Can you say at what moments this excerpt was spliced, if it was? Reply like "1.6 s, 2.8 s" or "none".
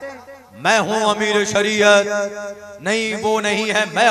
none